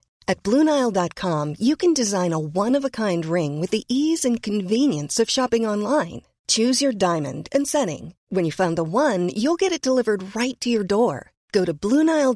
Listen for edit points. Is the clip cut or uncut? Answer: uncut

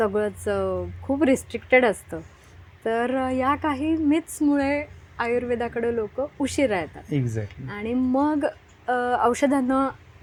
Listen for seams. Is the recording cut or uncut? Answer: uncut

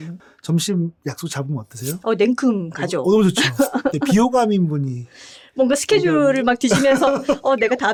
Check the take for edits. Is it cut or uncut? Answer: uncut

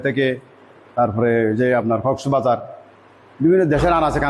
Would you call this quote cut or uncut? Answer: uncut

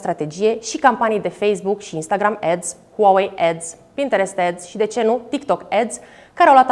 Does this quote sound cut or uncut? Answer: uncut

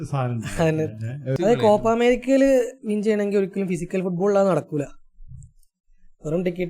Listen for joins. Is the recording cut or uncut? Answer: cut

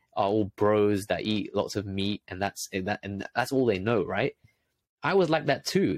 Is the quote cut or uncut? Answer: uncut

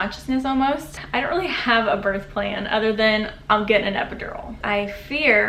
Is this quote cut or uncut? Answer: cut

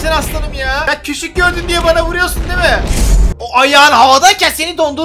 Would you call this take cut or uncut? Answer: uncut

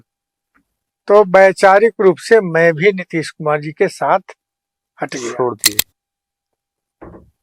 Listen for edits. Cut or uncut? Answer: uncut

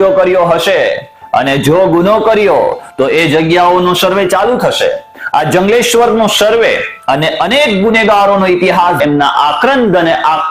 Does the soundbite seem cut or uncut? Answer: cut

